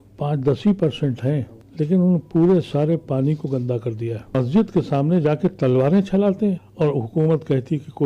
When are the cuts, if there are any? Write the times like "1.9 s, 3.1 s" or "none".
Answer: 1.6 s, 4.3 s, 6.7 s